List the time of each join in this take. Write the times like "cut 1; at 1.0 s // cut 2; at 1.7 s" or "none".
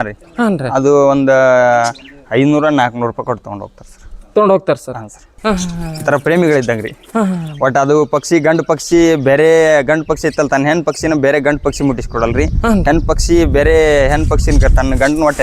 cut 1; at 5.2 s